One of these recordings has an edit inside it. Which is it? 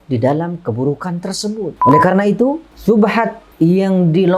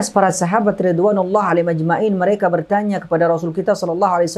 first; 3 cuts; at 1.8 s, 2.7 s, 3.4 s

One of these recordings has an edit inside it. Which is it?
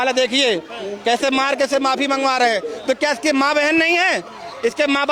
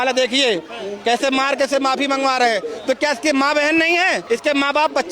second; 1 cut; at 4.2 s

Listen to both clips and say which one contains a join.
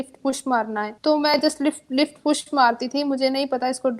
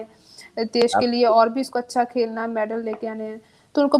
first; 1 cut; at 0.9 s

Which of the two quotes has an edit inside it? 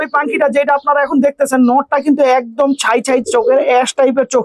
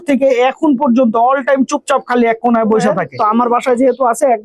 second; 1 cut; at 3.1 s

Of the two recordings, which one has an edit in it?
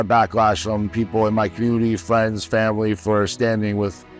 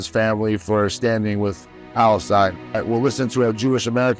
second; 1 cut; at 2.8 s

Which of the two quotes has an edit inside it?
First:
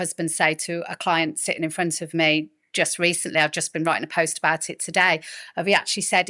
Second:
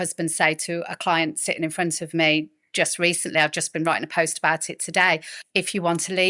second; 1 cut; at 5.4 s

